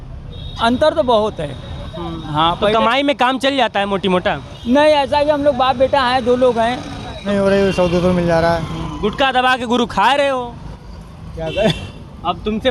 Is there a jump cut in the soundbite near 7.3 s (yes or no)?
yes